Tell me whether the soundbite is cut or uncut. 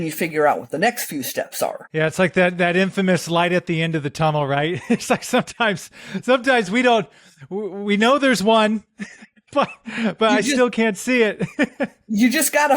cut